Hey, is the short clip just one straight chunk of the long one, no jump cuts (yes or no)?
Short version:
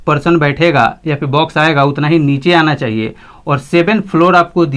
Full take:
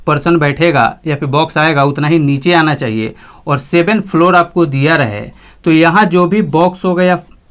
yes